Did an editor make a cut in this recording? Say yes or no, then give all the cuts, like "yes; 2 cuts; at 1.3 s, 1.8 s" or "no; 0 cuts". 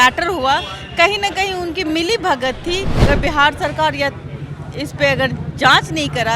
yes; 1 cut; at 3.0 s